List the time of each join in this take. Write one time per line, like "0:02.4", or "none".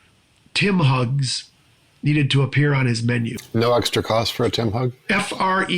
0:03.4